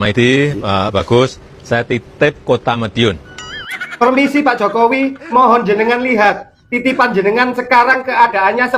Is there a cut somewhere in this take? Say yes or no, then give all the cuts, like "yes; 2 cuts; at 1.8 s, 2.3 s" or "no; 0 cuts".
no; 0 cuts